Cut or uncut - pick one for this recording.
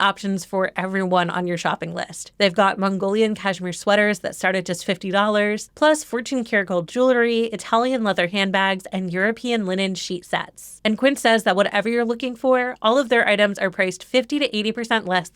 uncut